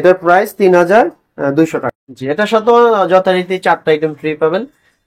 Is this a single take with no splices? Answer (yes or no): no